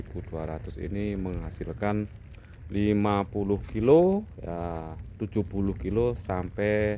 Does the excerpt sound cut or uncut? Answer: uncut